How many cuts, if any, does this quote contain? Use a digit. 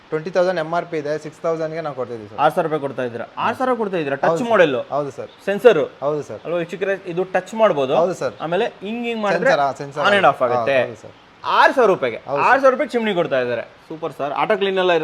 0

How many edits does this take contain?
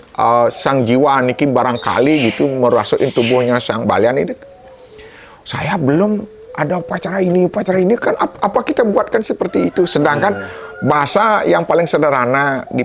0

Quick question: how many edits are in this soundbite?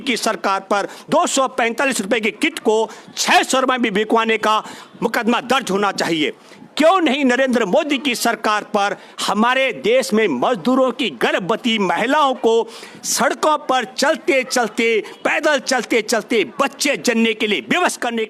0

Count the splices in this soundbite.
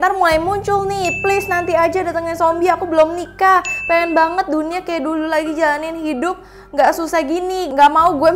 0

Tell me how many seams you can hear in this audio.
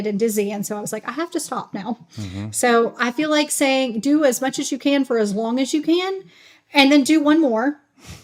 0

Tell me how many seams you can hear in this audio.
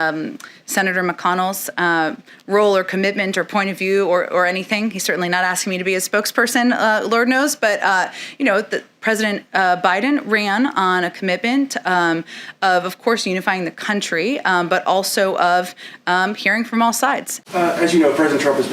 1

